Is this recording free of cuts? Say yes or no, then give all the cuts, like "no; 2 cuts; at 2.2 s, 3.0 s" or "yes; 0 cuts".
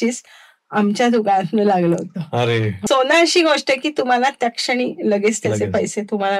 no; 1 cut; at 2.8 s